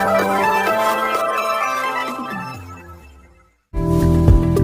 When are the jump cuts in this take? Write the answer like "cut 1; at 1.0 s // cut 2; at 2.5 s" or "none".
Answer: cut 1; at 3.5 s